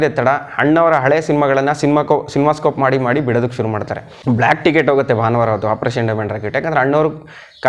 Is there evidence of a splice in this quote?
yes; 1 cut; at 4.1 s

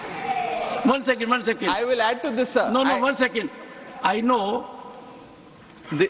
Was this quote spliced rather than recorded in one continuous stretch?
no; 0 cuts

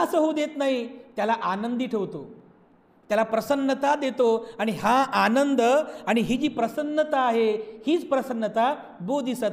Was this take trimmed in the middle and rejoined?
no; 0 cuts

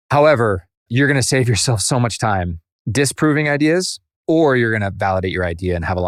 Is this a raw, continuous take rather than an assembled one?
yes; 0 cuts

